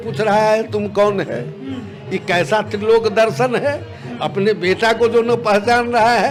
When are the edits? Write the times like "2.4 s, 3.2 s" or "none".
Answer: none